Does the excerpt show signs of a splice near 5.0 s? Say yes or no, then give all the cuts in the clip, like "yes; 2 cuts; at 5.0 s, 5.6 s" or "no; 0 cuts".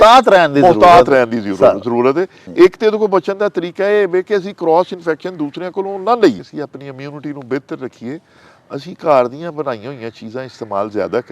no; 2 cuts; at 2.5 s, 6.4 s